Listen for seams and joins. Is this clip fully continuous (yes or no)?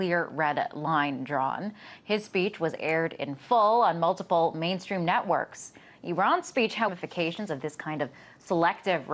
yes